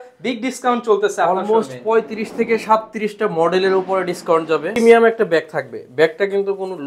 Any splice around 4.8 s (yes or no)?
yes